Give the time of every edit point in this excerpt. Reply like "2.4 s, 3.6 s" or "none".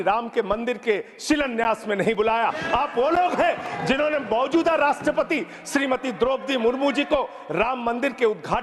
none